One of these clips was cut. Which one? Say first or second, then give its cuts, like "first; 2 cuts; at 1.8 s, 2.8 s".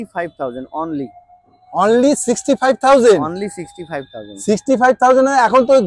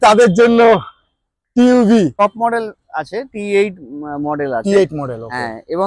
second; 1 cut; at 2.2 s